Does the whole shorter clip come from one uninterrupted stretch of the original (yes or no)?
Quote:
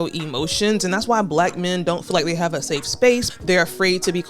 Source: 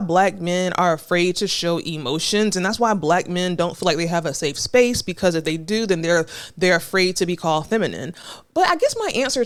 no